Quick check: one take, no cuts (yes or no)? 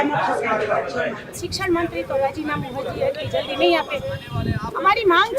no